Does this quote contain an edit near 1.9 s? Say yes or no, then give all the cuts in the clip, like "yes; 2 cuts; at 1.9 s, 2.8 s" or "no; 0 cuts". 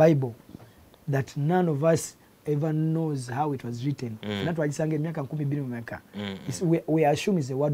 no; 0 cuts